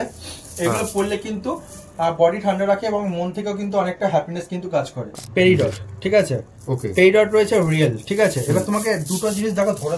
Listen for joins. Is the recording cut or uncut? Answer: cut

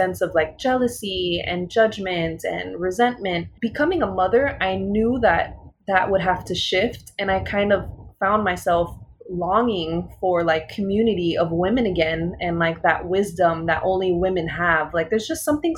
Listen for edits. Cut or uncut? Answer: cut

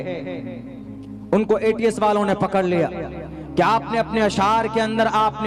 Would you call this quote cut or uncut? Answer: uncut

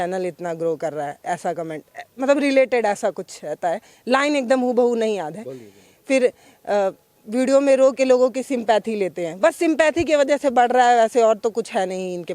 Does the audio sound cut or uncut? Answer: uncut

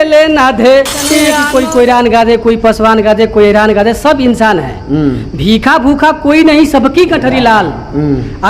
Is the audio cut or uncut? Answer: cut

